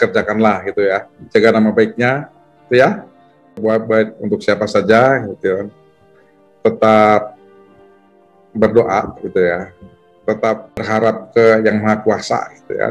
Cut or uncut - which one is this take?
cut